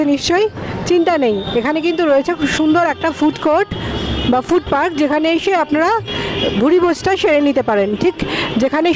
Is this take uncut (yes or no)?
yes